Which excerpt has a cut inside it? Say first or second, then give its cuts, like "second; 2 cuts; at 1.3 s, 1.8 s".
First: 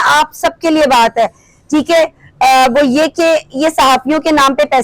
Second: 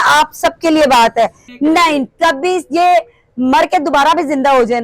second; 1 cut; at 1.5 s